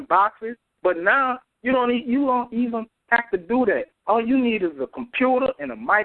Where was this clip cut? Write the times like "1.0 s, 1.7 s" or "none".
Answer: none